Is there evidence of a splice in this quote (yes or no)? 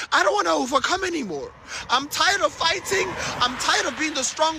no